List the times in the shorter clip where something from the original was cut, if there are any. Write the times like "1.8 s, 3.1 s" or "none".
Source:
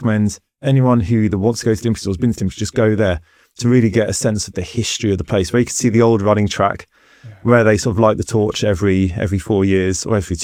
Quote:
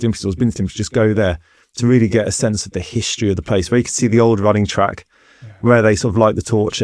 none